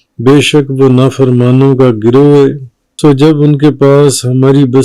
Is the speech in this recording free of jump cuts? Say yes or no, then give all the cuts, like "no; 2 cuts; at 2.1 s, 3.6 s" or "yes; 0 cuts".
no; 1 cut; at 2.8 s